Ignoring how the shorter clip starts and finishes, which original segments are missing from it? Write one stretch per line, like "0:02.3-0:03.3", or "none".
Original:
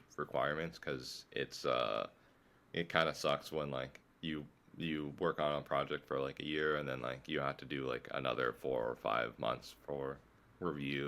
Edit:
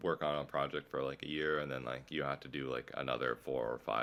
none